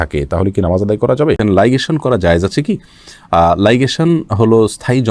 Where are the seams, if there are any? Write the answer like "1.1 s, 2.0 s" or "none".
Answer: 1.4 s